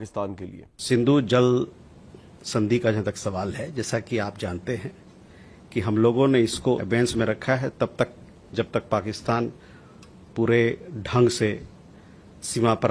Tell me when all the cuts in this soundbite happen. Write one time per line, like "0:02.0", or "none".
none